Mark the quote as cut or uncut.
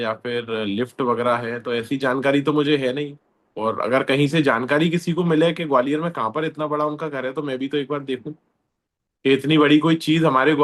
uncut